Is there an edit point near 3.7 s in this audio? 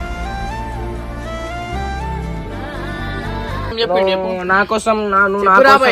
yes; 1 cut; at 3.7 s

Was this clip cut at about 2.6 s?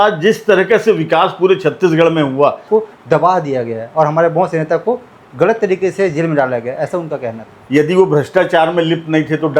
yes; 2 cuts; at 2.6 s, 7.6 s

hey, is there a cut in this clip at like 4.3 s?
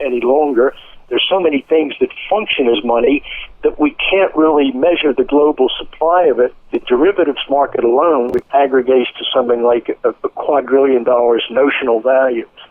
no; 2 cuts; at 6.7 s, 8.3 s

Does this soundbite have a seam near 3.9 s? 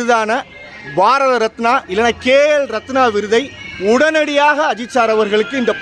no; 0 cuts

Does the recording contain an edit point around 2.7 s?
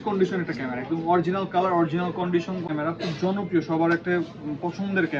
yes; 1 cut; at 2.7 s

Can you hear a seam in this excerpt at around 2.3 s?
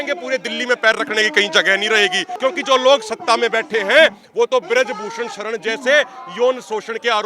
yes; 1 cut; at 2.3 s

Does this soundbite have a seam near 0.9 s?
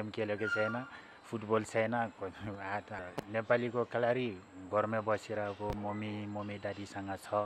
no; 1 cut; at 2.9 s

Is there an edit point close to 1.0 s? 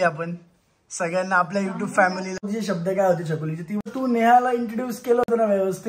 no; 2 cuts; at 2.4 s, 3.8 s

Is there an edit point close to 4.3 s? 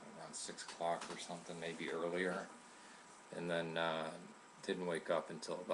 no; 1 cut; at 1.9 s

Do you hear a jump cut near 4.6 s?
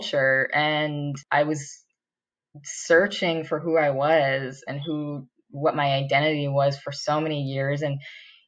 no; 1 cut; at 1.2 s

